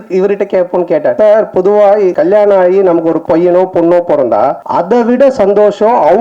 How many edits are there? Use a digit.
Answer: 4